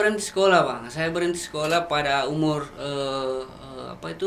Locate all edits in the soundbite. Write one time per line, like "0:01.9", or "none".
none